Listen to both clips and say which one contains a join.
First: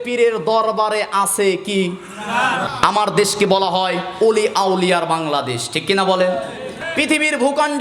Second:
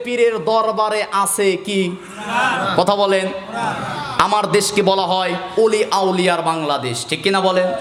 first; 2 cuts; at 2.6 s, 6.7 s

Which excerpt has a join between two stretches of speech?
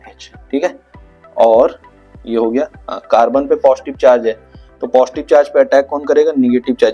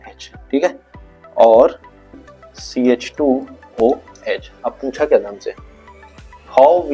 second; 1 cut; at 2.2 s

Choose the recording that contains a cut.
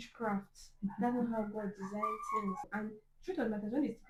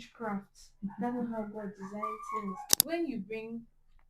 second; 1 cut; at 2.7 s

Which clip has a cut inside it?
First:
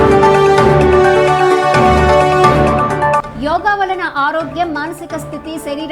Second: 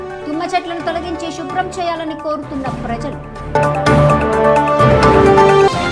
first; 1 cut; at 1.0 s

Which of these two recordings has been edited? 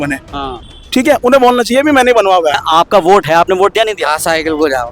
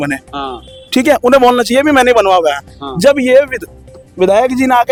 first; 1 cut; at 2.6 s

